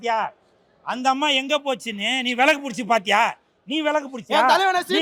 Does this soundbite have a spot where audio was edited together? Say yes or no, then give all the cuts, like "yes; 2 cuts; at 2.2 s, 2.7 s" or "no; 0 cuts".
no; 0 cuts